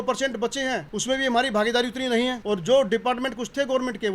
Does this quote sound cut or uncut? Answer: cut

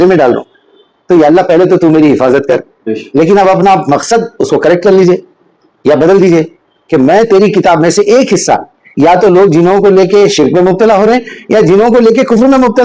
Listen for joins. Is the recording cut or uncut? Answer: uncut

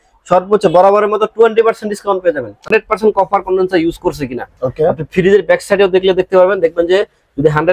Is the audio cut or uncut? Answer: cut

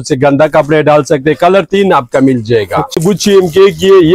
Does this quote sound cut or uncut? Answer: cut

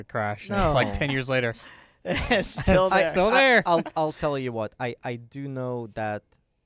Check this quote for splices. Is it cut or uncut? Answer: uncut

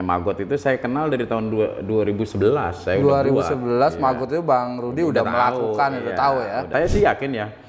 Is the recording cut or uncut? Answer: cut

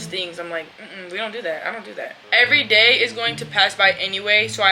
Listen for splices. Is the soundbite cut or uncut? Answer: cut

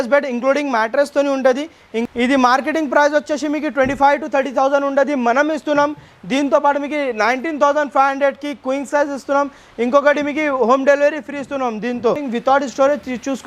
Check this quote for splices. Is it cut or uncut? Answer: cut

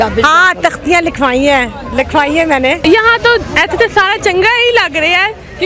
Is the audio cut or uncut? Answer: cut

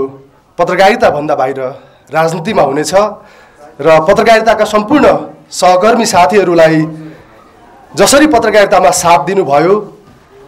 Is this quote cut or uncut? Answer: uncut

